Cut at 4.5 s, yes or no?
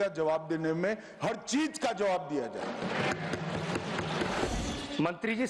yes